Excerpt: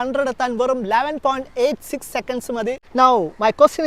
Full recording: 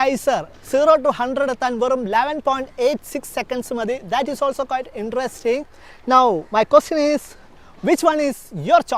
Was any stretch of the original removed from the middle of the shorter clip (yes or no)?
yes